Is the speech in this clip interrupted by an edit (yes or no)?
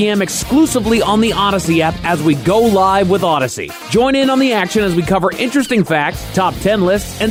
no